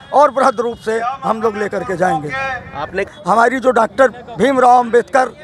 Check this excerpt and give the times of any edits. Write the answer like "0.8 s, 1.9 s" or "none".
3.1 s